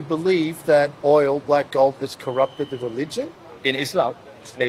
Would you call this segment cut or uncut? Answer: cut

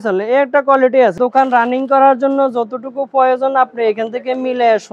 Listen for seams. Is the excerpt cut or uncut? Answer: cut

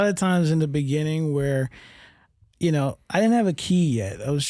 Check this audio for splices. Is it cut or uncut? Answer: uncut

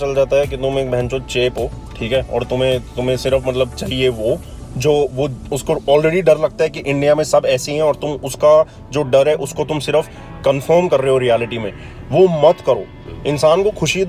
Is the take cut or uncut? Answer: uncut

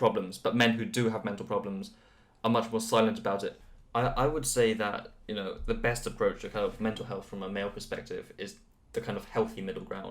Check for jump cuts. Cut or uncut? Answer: cut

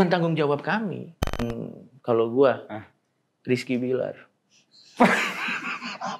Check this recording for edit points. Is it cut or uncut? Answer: cut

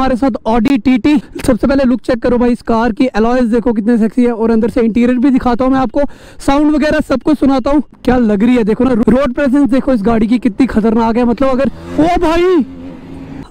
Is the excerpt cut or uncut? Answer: uncut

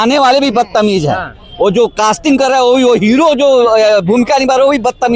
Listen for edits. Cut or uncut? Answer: uncut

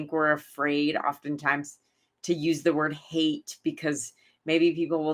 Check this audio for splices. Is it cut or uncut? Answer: uncut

